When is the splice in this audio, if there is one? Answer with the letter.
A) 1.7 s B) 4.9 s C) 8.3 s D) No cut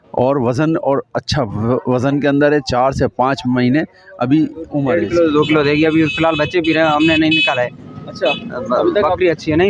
B